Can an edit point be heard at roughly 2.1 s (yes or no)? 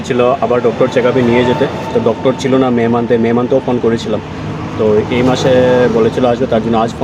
no